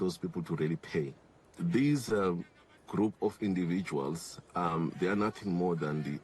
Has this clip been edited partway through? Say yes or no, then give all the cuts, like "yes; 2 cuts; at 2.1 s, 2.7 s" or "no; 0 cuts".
yes; 1 cut; at 1.5 s